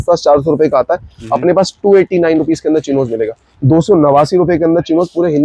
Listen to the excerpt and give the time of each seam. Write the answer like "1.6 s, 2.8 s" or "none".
none

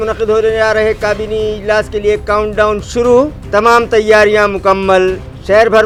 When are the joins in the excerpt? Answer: none

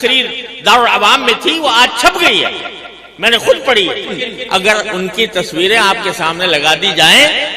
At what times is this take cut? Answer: 4.2 s

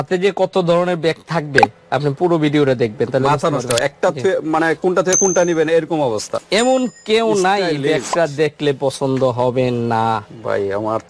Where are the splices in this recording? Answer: 6.3 s

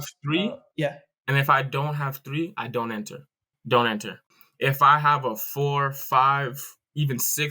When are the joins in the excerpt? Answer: 4.1 s

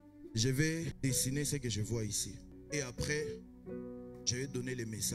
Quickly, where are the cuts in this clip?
0.9 s, 2.6 s

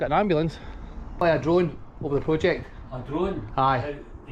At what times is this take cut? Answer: 1.2 s

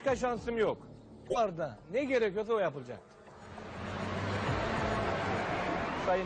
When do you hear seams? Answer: 1.3 s

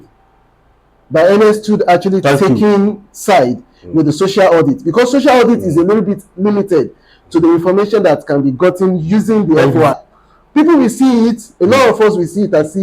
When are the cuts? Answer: 10.0 s

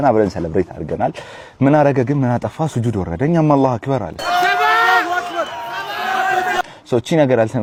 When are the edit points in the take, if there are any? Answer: none

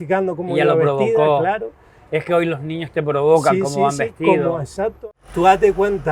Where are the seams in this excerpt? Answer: 5.0 s

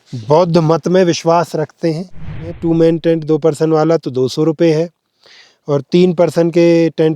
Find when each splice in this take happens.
2.5 s

